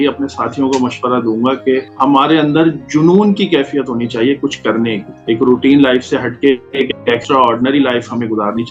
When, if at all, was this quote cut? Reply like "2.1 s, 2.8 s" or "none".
none